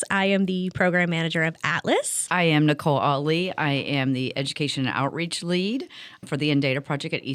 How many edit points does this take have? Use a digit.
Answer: 2